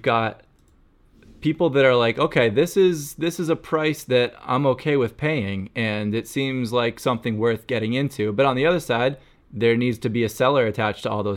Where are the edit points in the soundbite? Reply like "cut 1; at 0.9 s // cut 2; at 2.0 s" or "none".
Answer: none